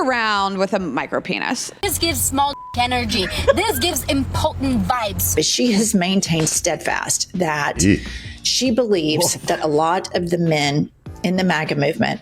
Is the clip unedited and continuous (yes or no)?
no